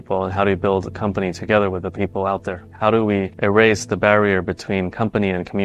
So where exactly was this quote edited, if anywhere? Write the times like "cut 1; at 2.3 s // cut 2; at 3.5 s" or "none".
cut 1; at 2.7 s